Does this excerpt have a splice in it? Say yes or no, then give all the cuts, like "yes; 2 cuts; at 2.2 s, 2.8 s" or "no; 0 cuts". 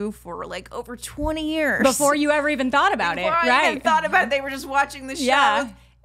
no; 0 cuts